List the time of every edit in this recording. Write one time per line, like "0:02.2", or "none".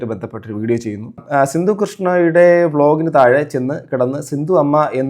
0:01.2

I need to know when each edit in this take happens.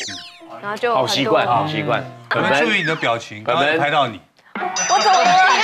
0:02.3

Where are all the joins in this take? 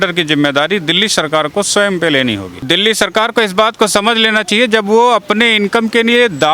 0:02.6

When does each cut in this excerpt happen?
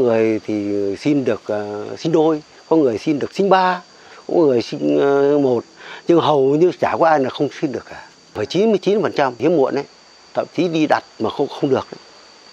0:08.4

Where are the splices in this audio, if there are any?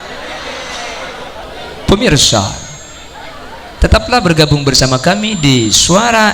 0:01.5

